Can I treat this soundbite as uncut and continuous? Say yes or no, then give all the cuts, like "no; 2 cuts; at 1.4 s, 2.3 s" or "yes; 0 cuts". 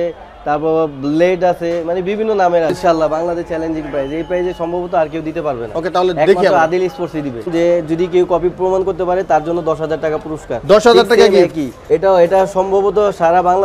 no; 3 cuts; at 2.7 s, 7.5 s, 11.7 s